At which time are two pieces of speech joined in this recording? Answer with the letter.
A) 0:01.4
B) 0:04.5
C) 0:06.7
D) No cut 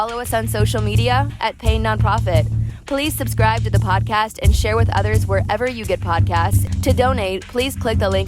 C